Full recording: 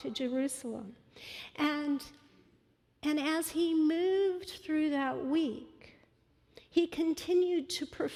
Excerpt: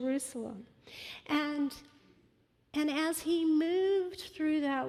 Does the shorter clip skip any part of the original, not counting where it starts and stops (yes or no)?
no